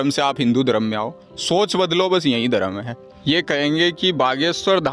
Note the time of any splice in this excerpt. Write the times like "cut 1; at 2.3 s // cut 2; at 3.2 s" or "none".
cut 1; at 3.1 s